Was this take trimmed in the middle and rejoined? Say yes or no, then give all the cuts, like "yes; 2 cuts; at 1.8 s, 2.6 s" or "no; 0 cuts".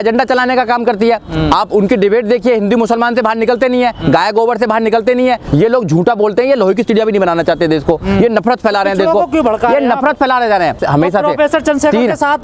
yes; 2 cuts; at 5.4 s, 10.8 s